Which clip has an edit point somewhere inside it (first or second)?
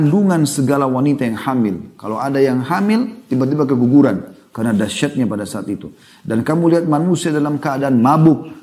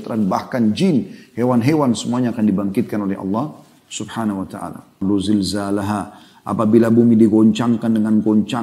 second